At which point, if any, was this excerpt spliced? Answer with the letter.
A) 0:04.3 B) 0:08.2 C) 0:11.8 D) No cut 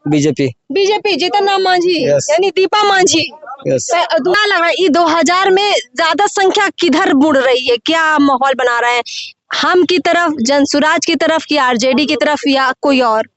A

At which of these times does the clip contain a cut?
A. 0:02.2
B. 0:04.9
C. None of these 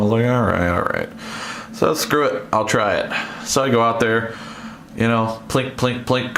C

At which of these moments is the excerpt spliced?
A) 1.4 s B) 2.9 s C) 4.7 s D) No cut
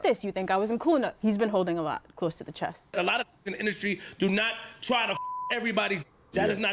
B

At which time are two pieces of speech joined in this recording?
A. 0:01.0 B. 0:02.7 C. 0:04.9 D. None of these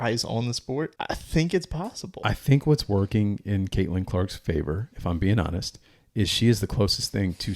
A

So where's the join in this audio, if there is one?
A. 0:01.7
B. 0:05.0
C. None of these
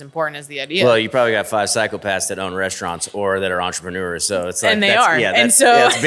C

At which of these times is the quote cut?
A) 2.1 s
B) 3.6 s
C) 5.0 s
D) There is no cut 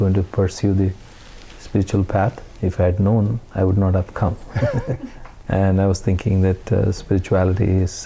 C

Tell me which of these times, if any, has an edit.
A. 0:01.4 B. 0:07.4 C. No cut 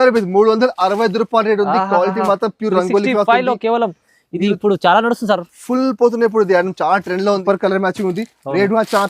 B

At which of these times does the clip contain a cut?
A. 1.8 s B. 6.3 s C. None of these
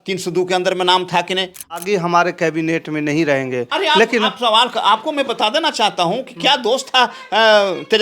A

